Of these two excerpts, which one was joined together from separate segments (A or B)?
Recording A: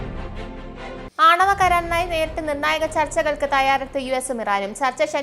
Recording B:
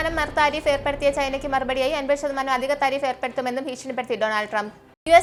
A